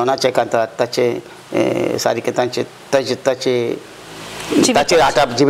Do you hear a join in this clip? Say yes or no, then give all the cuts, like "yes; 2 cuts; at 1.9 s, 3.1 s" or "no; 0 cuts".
no; 0 cuts